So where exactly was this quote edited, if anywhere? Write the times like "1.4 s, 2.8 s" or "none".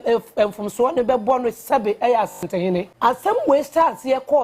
3.4 s